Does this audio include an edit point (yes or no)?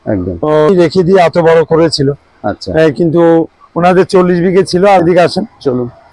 yes